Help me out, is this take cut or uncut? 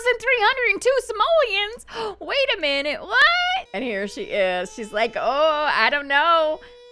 cut